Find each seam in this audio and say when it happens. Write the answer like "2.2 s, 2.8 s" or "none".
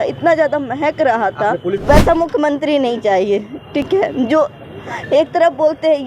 1.8 s